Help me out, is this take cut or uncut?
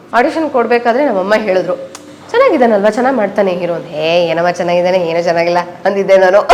uncut